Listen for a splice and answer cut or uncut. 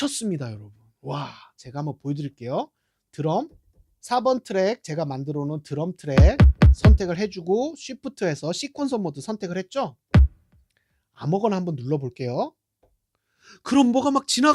uncut